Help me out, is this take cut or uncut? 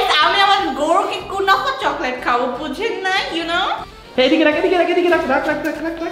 cut